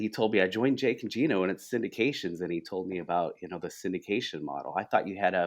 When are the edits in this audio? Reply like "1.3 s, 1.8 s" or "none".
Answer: none